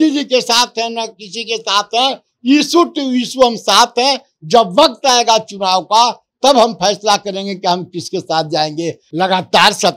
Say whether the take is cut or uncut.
cut